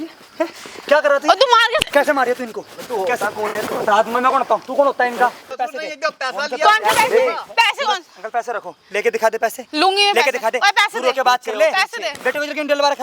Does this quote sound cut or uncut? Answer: cut